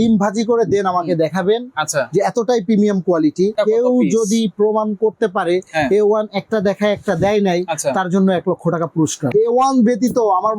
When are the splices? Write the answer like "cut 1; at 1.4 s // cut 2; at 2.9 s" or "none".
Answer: cut 1; at 3.5 s // cut 2; at 9.2 s